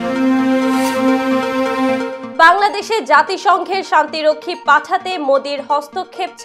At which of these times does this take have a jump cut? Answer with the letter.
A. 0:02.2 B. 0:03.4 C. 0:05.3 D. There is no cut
D